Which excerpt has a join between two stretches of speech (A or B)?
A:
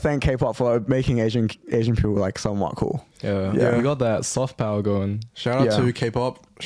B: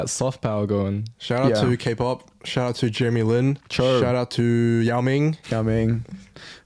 B